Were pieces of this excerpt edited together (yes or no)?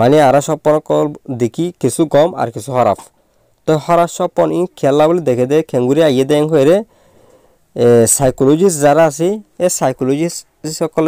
no